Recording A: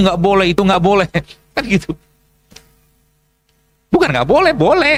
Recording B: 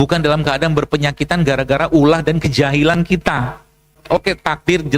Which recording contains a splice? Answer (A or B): B